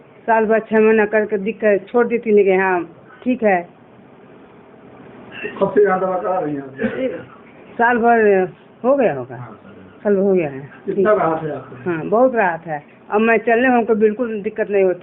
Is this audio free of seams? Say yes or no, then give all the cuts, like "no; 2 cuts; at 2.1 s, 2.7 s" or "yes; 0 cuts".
yes; 0 cuts